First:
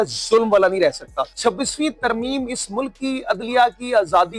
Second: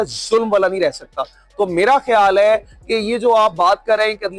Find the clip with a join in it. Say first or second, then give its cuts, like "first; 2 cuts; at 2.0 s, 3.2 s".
first; 1 cut; at 1.2 s